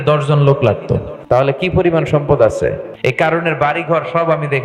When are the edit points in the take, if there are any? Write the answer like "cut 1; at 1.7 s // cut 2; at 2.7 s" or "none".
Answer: cut 1; at 1.3 s // cut 2; at 3.0 s